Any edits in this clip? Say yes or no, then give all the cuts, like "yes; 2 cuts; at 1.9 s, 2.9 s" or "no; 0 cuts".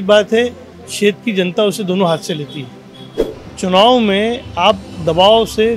yes; 1 cut; at 3.4 s